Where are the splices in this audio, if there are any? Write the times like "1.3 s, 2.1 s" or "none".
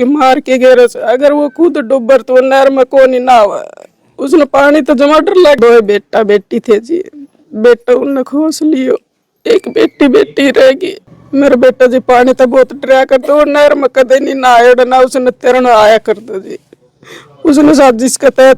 5.6 s, 11.2 s